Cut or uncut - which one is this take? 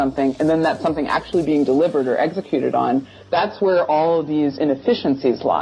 uncut